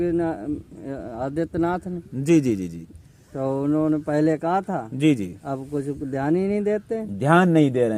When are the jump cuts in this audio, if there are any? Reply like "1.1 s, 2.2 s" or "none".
none